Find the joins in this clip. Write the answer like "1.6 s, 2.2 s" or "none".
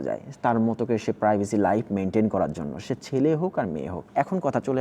none

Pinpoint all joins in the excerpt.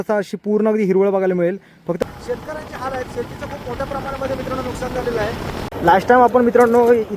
2.0 s, 5.6 s

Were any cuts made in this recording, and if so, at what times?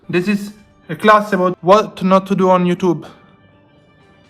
1.6 s

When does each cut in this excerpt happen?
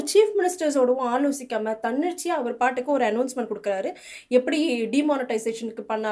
none

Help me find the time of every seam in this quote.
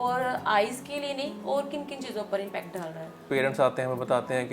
3.2 s

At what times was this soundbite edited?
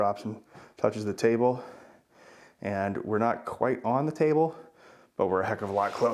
none

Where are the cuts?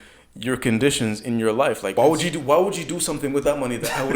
1.9 s

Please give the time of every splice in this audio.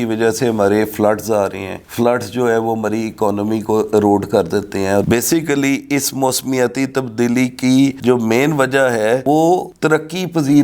none

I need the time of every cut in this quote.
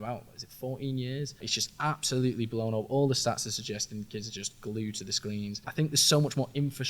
1.5 s, 5.7 s

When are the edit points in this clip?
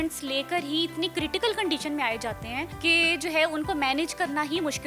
2.7 s

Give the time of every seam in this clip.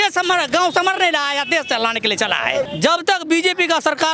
2.7 s

